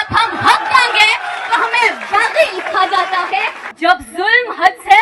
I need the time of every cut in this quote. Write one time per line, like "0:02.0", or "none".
0:03.6